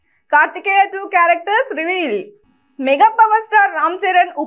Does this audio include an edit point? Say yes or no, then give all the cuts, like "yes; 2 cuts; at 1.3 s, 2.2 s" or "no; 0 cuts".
yes; 1 cut; at 2.4 s